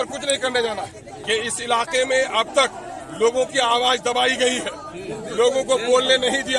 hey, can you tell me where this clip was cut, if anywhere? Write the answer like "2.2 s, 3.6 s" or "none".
1.1 s